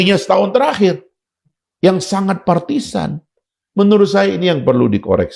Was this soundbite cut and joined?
no; 0 cuts

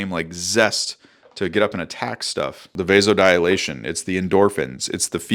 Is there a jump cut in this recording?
yes; 1 cut; at 2.7 s

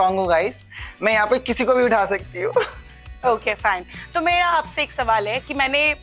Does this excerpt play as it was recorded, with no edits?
yes; 0 cuts

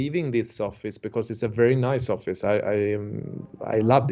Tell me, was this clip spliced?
no; 0 cuts

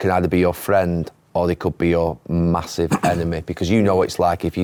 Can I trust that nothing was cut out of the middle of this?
yes; 0 cuts

